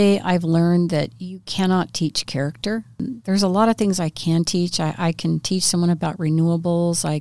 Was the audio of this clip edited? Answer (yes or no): yes